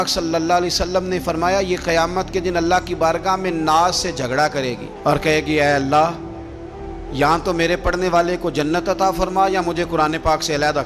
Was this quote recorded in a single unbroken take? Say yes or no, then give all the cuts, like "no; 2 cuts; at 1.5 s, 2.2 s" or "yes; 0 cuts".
yes; 0 cuts